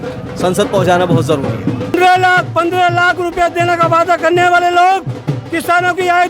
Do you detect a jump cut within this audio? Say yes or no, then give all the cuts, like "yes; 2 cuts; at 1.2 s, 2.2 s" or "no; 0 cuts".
yes; 1 cut; at 1.9 s